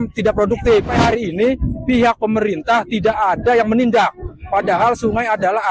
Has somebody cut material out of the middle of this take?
yes; 1 cut; at 0.9 s

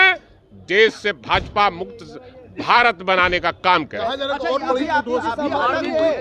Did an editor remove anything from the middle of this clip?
no; 0 cuts

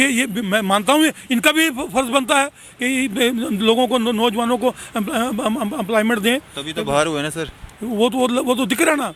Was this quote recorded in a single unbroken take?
yes; 0 cuts

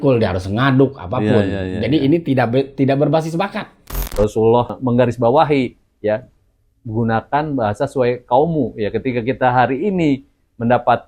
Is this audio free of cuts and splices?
no; 2 cuts; at 4.0 s, 4.7 s

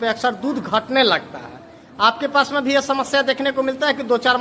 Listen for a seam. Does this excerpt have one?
no; 0 cuts

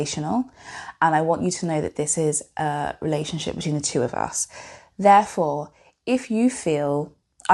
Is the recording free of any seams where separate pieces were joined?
yes; 0 cuts

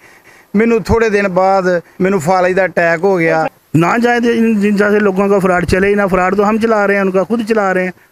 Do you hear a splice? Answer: yes; 1 cut; at 1.9 s

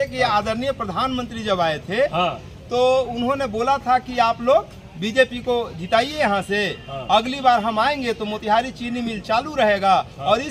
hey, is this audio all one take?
yes; 0 cuts

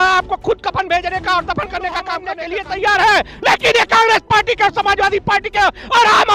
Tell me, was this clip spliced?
yes; 1 cut; at 2.3 s

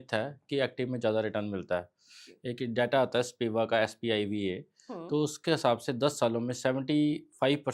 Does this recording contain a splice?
no; 0 cuts

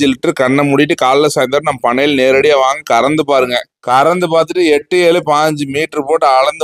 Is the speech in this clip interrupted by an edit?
no; 0 cuts

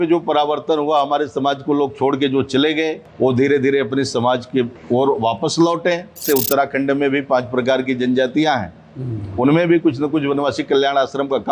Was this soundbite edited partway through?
yes; 3 cuts; at 3.0 s, 4.8 s, 6.2 s

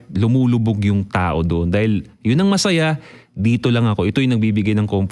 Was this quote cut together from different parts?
no; 0 cuts

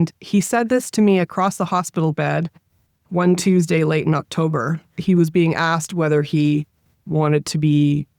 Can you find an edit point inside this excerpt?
yes; 2 cuts; at 4.8 s, 7.0 s

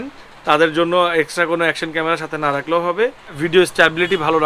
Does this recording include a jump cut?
yes; 1 cut; at 3.4 s

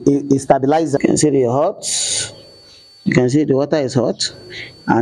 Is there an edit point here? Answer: yes; 1 cut; at 1.0 s

